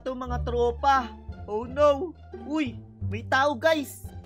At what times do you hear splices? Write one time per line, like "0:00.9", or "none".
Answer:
0:02.5